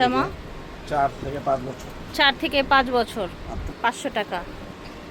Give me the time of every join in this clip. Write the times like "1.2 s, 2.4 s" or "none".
none